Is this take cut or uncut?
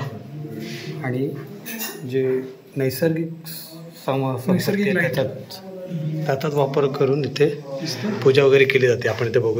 uncut